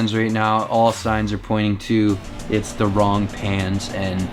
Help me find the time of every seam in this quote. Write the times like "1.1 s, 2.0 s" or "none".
none